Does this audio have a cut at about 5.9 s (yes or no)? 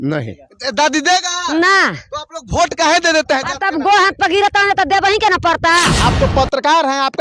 yes